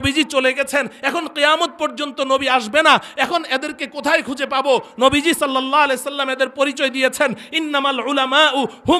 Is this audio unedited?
yes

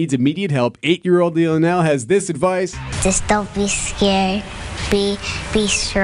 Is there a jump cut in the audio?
yes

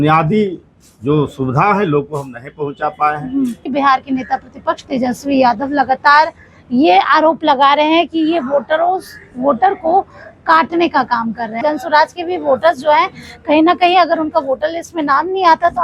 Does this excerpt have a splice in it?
yes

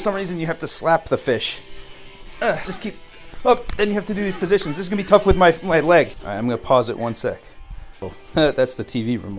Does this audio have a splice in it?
yes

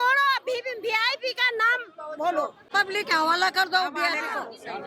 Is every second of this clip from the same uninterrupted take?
no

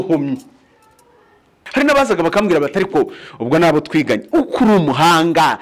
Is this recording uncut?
no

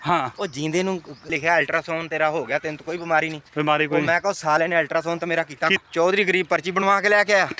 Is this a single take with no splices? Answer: no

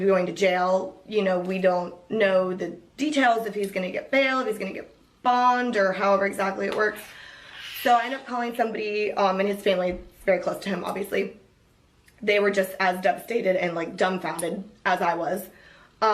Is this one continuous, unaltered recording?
yes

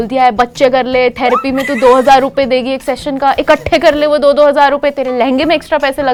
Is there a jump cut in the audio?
no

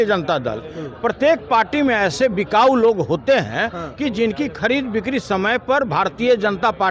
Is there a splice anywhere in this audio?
no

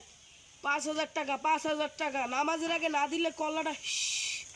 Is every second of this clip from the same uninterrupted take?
yes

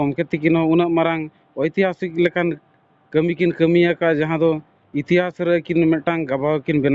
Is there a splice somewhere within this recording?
no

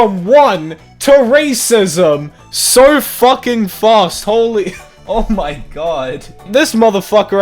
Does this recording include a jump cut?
yes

